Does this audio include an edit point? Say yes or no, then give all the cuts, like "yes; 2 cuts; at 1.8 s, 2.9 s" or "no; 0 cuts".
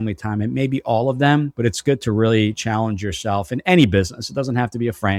no; 0 cuts